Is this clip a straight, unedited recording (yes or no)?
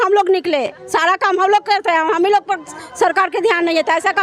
yes